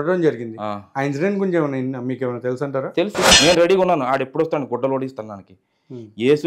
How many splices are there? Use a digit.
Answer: 1